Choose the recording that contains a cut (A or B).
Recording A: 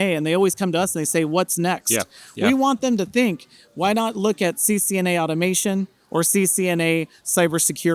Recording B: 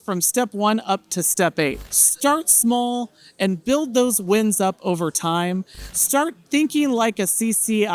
B